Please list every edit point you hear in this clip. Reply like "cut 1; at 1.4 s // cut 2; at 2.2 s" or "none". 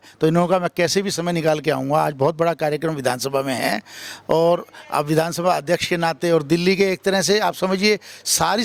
none